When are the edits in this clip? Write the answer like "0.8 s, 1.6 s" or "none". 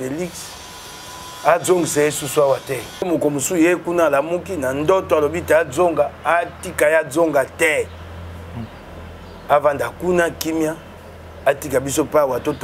3.1 s